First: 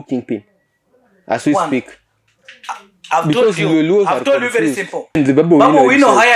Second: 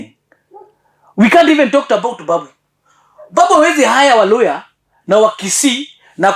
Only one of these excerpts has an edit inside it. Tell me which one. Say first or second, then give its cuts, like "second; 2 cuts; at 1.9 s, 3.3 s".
first; 1 cut; at 5.2 s